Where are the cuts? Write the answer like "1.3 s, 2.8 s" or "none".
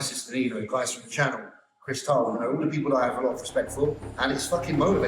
4.1 s